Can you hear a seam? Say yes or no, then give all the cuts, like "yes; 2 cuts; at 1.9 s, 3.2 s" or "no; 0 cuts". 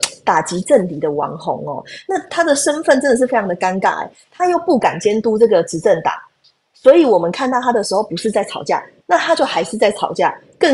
no; 0 cuts